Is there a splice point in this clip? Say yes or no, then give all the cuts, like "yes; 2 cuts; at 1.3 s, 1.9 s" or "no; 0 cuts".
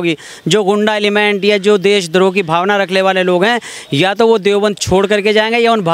no; 0 cuts